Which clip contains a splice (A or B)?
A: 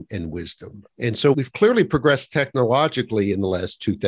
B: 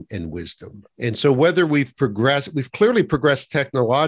A